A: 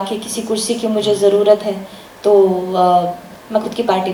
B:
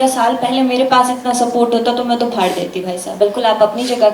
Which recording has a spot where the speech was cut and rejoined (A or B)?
B